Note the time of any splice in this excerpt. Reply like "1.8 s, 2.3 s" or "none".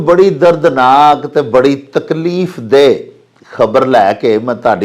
none

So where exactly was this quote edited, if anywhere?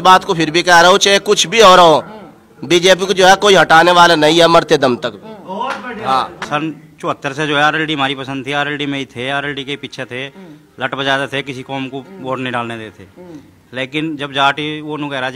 6.4 s

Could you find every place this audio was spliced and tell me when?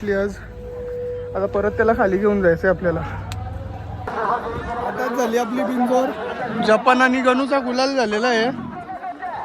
4.1 s

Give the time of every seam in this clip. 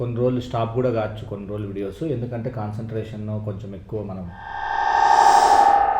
4.4 s

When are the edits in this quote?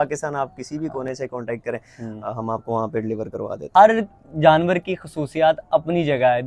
3.6 s

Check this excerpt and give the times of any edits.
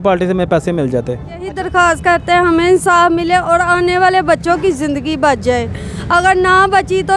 1.4 s

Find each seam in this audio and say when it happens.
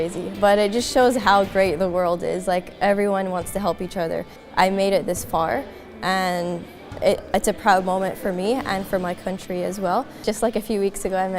4.4 s, 10.2 s

